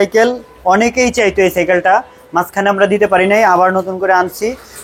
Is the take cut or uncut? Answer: uncut